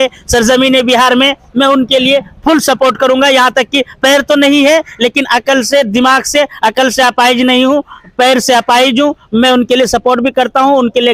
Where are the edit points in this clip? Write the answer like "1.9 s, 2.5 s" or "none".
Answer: none